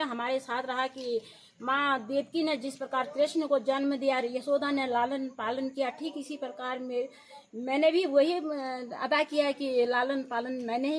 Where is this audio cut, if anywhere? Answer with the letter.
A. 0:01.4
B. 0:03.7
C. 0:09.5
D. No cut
D